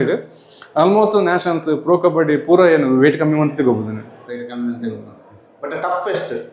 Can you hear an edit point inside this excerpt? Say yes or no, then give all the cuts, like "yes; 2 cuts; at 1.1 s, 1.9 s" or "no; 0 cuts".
no; 0 cuts